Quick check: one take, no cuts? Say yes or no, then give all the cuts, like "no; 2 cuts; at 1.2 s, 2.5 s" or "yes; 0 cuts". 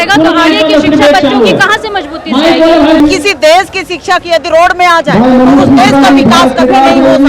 no; 1 cut; at 3.0 s